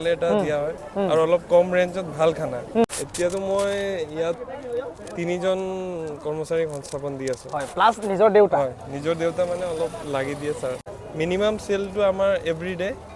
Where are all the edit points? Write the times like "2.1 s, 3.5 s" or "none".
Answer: 2.8 s, 10.8 s